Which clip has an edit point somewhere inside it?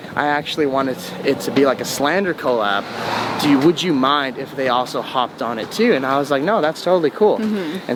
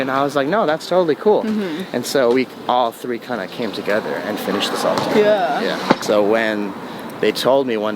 second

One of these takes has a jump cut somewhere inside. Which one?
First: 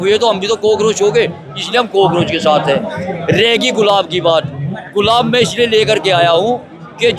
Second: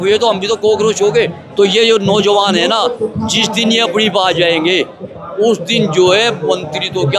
second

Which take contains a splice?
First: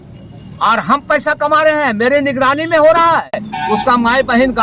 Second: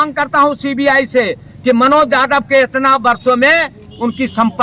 first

